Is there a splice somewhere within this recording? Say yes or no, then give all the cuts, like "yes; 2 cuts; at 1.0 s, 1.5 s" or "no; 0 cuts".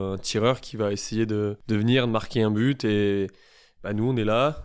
yes; 1 cut; at 1.6 s